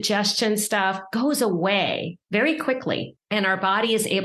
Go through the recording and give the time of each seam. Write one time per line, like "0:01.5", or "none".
0:02.1
0:03.2